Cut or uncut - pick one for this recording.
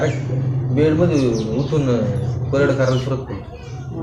uncut